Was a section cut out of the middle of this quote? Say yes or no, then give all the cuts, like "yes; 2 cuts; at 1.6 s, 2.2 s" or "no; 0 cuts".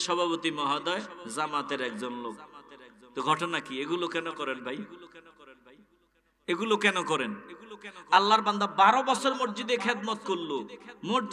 no; 0 cuts